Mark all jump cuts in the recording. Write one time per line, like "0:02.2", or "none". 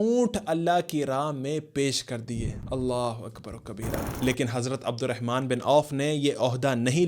0:04.1